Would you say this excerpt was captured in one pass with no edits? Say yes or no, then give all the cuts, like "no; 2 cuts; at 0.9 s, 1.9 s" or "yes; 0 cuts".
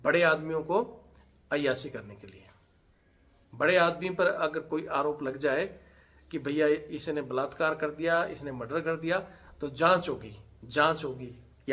yes; 0 cuts